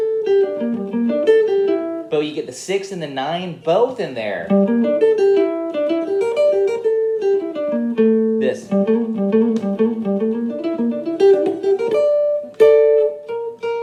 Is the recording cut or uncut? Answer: uncut